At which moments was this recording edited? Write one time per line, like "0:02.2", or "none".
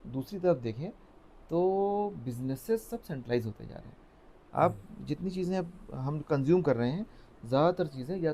none